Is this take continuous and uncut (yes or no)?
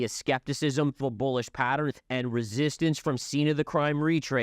no